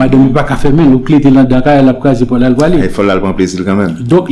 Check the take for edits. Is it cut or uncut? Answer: uncut